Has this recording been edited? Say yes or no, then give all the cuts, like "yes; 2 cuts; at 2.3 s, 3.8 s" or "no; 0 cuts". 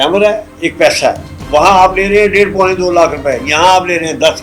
no; 0 cuts